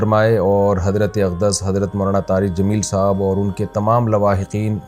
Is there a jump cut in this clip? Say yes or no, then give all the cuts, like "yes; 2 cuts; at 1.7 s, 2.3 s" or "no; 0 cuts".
no; 0 cuts